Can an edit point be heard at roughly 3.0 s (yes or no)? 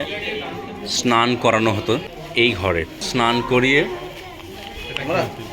yes